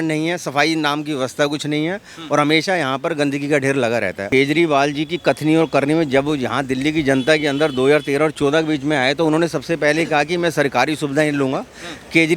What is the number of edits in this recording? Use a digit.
1